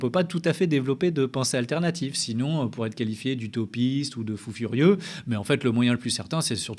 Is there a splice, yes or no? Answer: no